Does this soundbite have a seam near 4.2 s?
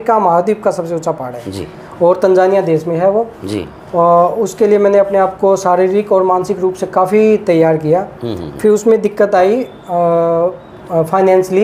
no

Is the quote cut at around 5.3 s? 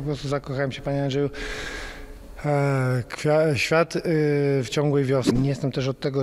yes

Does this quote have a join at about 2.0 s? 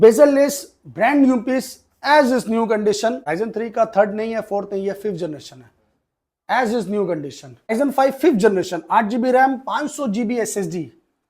no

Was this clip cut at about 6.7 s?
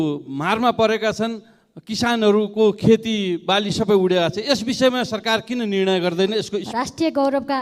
yes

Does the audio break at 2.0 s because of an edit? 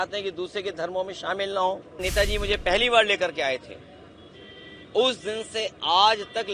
yes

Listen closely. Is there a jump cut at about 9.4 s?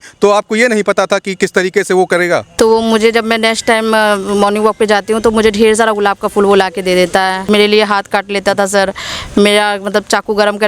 no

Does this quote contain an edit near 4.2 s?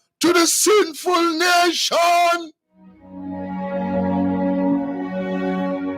no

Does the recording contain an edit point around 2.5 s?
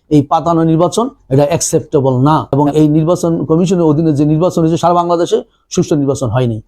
yes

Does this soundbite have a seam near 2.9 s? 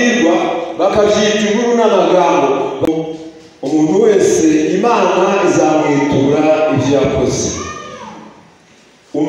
yes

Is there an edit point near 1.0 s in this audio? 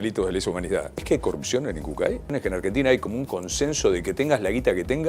yes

